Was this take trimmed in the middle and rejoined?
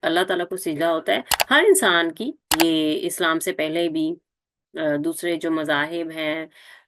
yes; 2 cuts; at 1.3 s, 2.4 s

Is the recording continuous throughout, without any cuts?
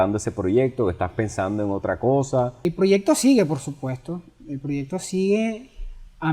no; 1 cut; at 2.6 s

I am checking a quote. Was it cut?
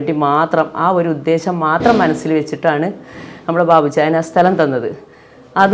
no; 0 cuts

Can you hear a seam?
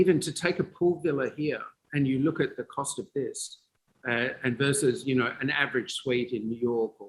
no; 0 cuts

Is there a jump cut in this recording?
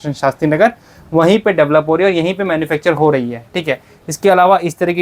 no; 0 cuts

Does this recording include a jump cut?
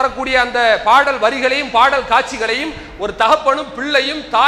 no; 0 cuts

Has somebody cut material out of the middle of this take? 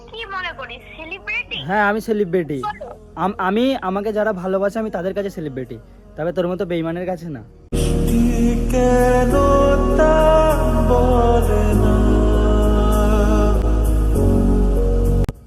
no; 0 cuts

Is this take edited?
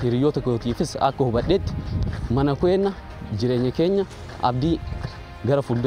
no; 0 cuts

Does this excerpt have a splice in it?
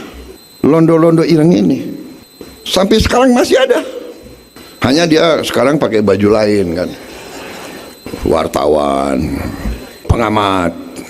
yes; 1 cut; at 10.1 s

